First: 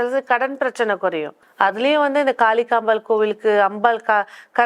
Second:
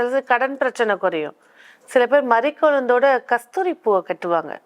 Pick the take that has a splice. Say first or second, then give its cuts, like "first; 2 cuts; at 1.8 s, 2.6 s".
first; 1 cut; at 1.4 s